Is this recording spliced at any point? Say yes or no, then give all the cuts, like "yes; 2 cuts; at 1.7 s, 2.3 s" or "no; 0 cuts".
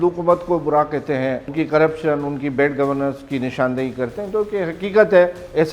yes; 1 cut; at 1.5 s